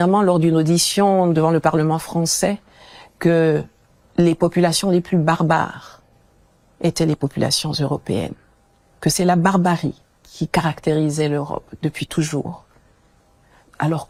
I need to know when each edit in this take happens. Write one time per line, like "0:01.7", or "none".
none